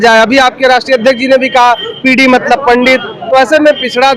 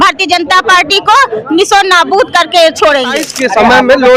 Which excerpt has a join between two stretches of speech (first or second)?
second